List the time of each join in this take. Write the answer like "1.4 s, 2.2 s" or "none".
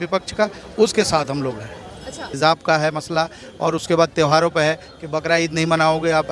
2.3 s